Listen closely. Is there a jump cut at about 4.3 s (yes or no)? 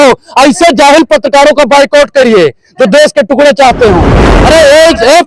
yes